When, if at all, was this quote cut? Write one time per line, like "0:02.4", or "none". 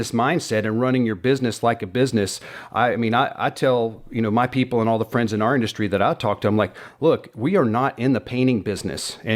none